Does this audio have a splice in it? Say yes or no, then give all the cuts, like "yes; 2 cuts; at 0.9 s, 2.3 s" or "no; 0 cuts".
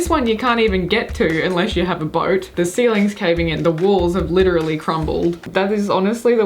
yes; 2 cuts; at 2.5 s, 5.4 s